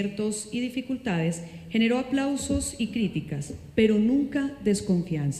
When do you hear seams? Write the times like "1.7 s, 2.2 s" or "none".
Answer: none